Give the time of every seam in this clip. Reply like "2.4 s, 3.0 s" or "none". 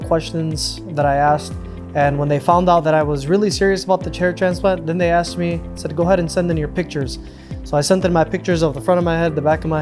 none